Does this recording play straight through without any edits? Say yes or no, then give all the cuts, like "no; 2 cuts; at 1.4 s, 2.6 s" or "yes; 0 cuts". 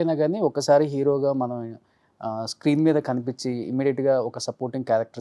yes; 0 cuts